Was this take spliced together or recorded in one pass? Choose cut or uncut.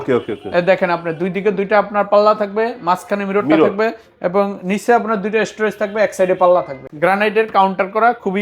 cut